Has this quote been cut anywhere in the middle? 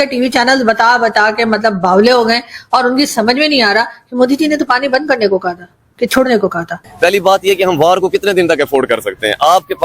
yes; 1 cut; at 6.8 s

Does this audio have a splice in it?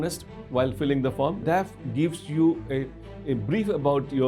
yes; 1 cut; at 1.4 s

